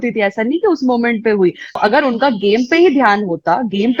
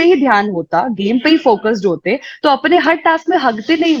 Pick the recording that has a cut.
first; 1 cut; at 1.8 s

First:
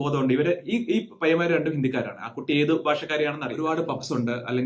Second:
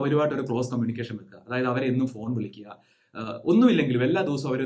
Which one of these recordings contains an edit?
first; 1 cut; at 3.5 s

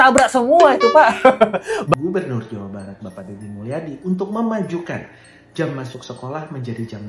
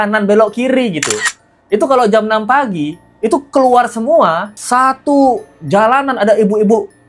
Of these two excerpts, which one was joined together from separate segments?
first; 1 cut; at 1.9 s

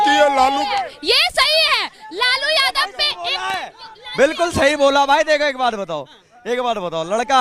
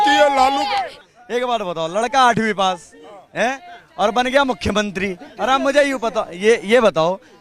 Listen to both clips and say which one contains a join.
second; 1 cut; at 1.0 s

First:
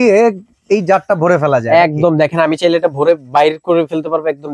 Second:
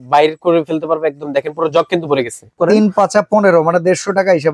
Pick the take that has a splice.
second; 1 cut; at 2.6 s

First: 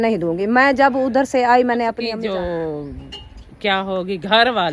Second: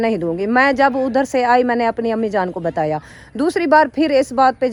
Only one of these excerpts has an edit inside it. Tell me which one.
first; 1 cut; at 2.1 s

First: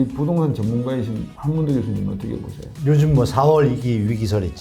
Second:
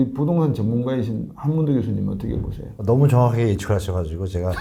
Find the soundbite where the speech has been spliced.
first; 1 cut; at 2.8 s

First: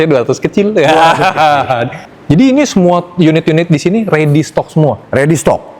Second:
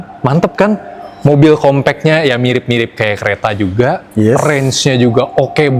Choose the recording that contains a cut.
first; 1 cut; at 2.0 s

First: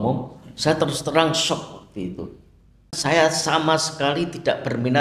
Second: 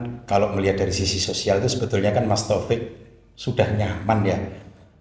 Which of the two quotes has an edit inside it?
first; 1 cut; at 3.0 s

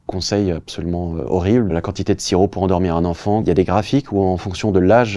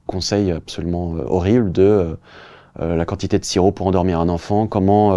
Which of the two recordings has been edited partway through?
first; 2 cuts; at 1.7 s, 3.4 s

